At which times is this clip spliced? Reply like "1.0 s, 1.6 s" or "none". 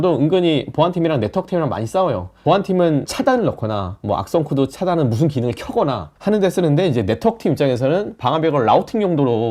none

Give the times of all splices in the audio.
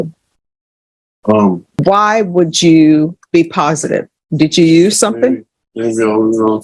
1.8 s, 3.2 s, 4.2 s

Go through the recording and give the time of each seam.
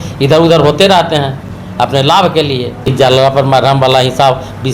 2.9 s

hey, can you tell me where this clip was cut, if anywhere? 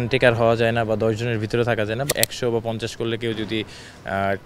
2.1 s

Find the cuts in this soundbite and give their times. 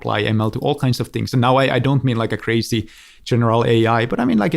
none

